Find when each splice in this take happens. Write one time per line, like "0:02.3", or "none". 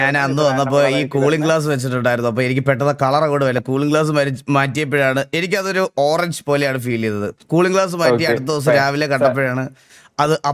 none